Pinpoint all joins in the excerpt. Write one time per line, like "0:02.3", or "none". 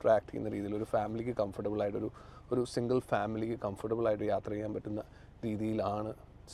none